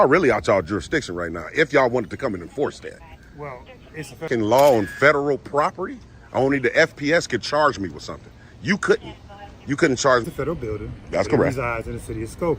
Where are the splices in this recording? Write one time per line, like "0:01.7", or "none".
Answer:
0:04.3
0:10.3